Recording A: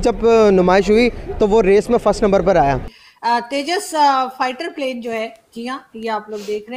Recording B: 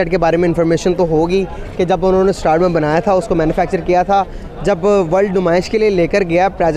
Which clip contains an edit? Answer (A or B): A